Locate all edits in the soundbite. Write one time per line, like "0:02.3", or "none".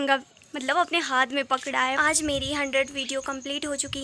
0:02.0